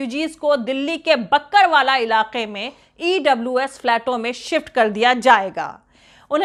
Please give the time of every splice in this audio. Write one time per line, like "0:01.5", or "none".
none